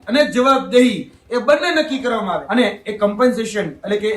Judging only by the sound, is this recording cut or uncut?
cut